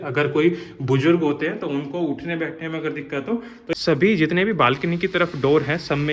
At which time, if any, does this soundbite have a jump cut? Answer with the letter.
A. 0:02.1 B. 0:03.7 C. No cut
B